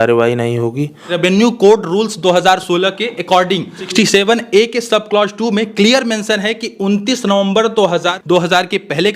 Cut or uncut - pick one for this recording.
cut